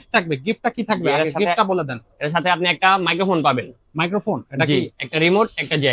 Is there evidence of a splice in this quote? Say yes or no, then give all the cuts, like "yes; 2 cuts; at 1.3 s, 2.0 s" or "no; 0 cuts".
no; 0 cuts